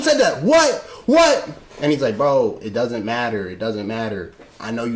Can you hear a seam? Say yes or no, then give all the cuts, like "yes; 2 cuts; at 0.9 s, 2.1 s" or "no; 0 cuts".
no; 0 cuts